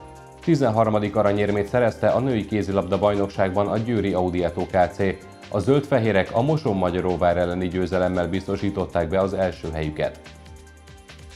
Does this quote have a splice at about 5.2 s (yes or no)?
no